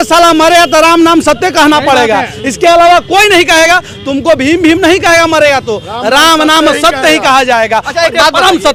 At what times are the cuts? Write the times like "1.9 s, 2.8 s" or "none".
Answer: none